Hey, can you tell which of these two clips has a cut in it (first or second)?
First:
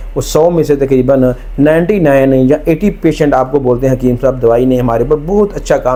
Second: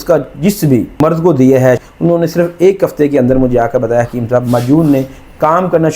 second